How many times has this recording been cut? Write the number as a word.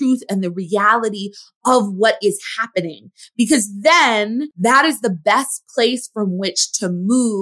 one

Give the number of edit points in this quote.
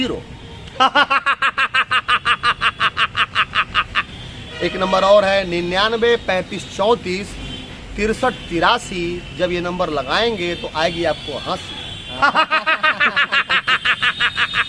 zero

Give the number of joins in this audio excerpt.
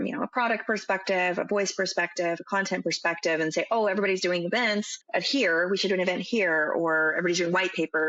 one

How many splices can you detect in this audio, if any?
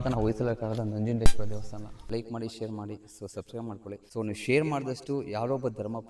two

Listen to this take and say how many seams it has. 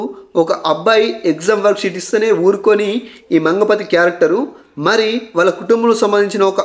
zero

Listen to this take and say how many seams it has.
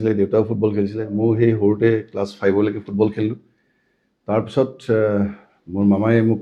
zero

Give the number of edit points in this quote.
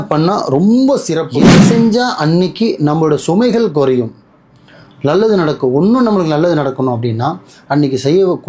one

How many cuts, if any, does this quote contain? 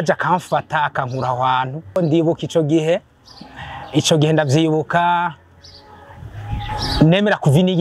one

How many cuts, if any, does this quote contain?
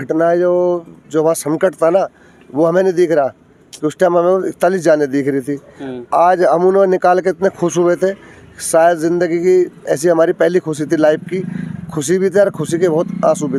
zero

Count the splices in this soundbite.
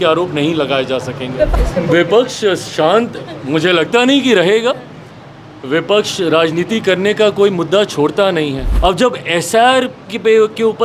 two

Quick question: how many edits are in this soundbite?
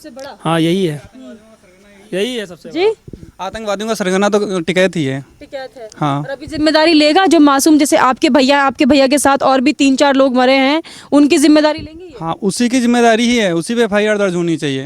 zero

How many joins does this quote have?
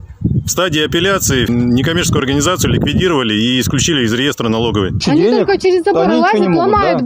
two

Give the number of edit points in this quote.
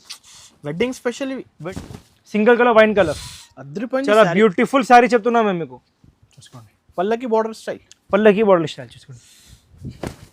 one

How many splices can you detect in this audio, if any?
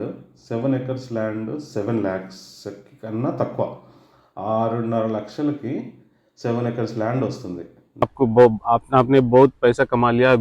one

